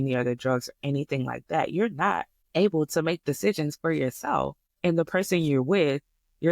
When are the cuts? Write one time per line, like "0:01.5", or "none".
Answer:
0:02.4
0:04.6